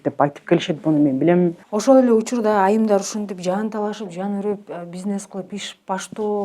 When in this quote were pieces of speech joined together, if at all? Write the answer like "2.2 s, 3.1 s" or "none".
1.6 s